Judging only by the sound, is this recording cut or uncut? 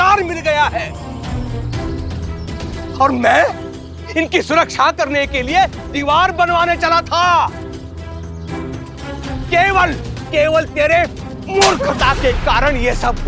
cut